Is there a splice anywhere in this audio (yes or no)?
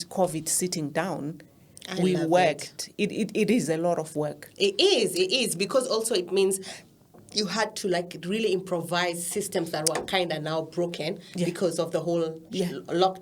no